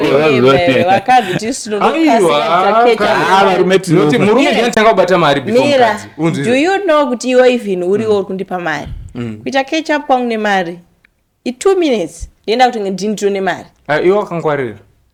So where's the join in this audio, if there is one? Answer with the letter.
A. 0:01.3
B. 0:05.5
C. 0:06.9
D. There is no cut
D